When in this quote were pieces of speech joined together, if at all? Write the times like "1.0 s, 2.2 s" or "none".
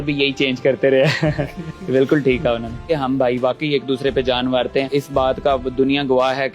2.9 s, 4.9 s